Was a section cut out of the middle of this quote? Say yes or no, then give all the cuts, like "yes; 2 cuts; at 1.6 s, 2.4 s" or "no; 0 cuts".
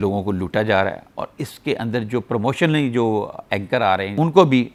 no; 0 cuts